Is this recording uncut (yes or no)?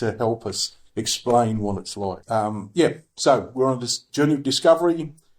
no